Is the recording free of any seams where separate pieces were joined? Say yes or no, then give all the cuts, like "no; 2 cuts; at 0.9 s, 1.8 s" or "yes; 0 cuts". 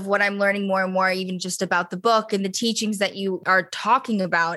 no; 1 cut; at 3.4 s